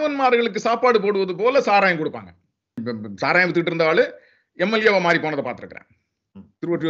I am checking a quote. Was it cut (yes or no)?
yes